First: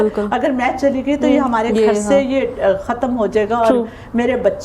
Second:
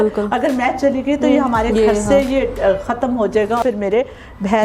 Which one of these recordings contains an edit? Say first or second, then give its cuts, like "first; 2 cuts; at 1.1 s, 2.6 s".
second; 1 cut; at 3.6 s